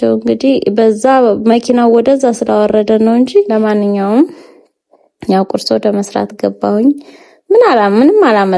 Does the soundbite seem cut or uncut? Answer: cut